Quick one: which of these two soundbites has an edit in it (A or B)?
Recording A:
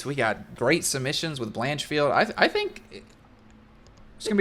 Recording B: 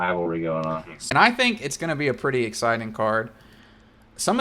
B